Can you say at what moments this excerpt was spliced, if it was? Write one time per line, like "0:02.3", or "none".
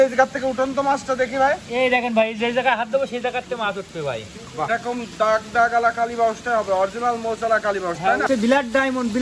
0:04.7
0:08.2